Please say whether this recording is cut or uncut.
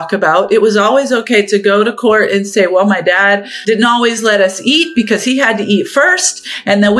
cut